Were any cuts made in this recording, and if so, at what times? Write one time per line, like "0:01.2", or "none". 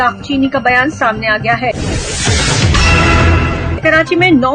0:01.7
0:03.8